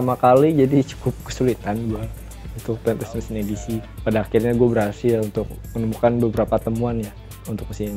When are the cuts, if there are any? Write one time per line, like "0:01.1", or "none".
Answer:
0:03.8